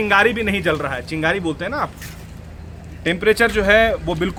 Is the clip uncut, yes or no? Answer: yes